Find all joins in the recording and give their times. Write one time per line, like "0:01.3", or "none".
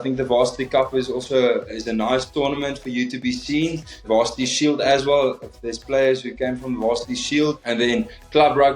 0:01.7